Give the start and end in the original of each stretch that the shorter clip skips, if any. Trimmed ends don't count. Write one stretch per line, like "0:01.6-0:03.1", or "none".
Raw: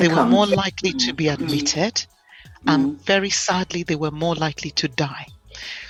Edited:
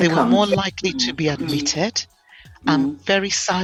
none